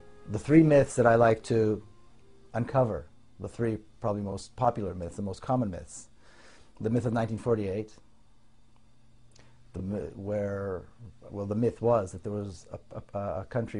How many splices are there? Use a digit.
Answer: 1